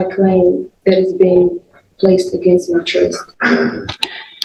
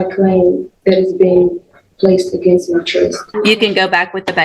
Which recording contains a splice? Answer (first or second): second